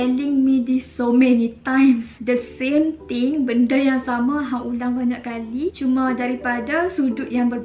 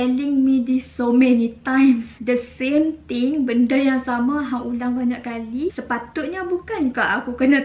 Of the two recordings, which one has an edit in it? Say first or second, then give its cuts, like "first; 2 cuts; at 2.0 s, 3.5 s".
second; 1 cut; at 5.8 s